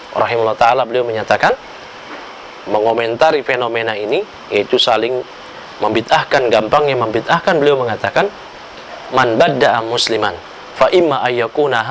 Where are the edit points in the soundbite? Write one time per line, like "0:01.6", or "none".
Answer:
none

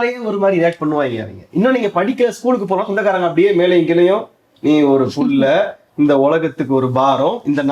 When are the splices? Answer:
none

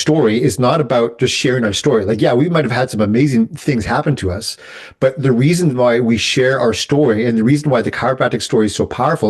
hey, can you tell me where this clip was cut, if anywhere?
none

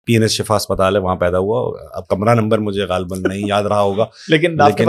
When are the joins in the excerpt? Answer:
none

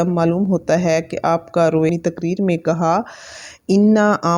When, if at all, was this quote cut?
0:01.9

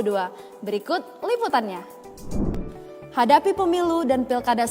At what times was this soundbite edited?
0:02.6

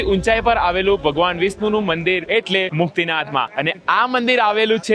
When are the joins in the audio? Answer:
0:03.5

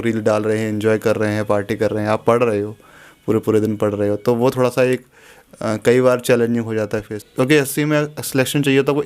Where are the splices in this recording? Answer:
0:07.2

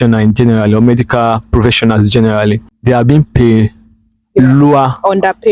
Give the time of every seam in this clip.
0:02.7

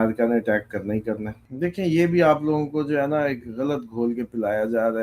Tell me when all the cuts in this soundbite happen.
0:01.3

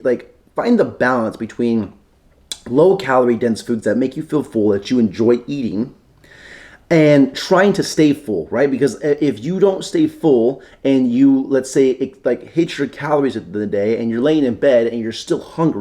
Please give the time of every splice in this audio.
none

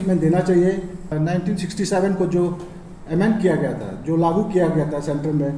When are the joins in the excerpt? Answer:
0:01.1

